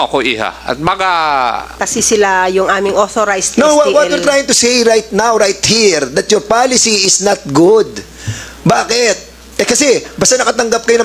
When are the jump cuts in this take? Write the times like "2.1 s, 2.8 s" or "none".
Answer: 1.8 s